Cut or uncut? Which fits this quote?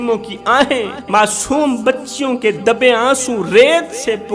cut